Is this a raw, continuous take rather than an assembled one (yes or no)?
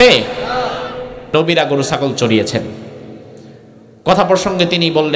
no